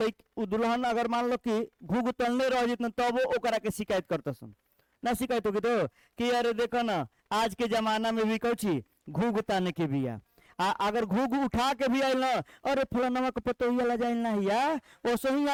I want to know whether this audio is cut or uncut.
uncut